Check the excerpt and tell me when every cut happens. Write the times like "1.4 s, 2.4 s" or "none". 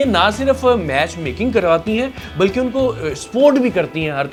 none